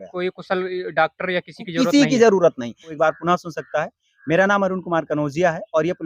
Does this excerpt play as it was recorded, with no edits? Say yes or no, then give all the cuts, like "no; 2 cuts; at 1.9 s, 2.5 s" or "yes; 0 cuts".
no; 1 cut; at 2.8 s